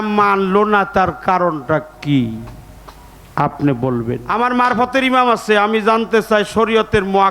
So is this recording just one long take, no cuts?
no; 1 cut; at 4.2 s

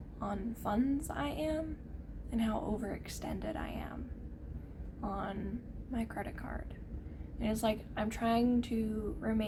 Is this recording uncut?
yes; 0 cuts

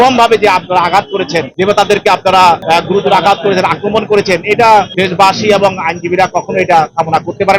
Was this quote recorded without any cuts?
no; 2 cuts; at 2.6 s, 4.9 s

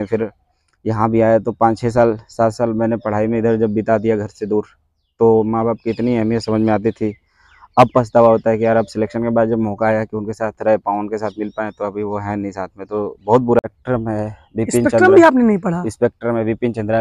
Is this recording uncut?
no; 1 cut; at 13.6 s

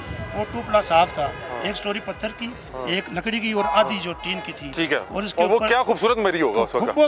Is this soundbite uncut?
yes; 0 cuts

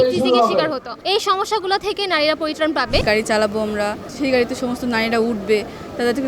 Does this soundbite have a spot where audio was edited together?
yes; 3 cuts; at 0.9 s, 3.0 s, 4.0 s

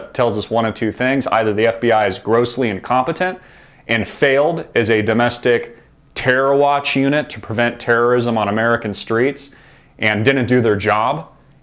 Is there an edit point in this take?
yes; 1 cut; at 7.8 s

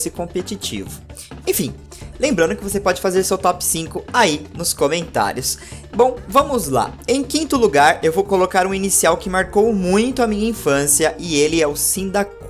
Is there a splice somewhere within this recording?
yes; 1 cut; at 11.1 s

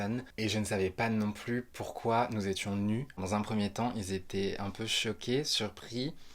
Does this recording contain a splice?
yes; 1 cut; at 3.2 s

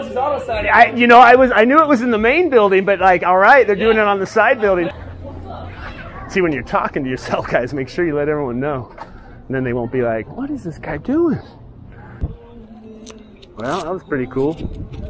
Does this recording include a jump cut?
yes; 2 cuts; at 4.9 s, 12.2 s

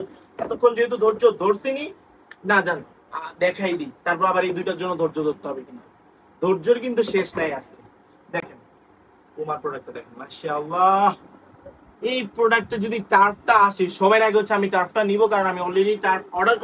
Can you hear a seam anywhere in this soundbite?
no; 0 cuts

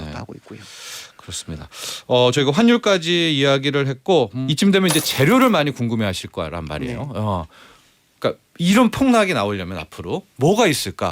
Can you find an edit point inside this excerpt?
yes; 1 cut; at 4.4 s

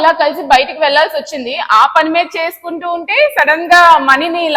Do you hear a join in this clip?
no; 0 cuts

